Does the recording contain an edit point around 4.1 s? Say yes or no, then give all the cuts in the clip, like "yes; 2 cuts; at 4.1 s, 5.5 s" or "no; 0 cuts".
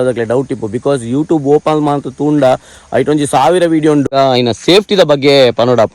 yes; 1 cut; at 4.1 s